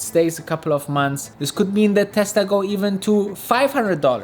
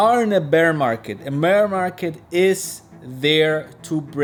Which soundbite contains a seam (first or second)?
first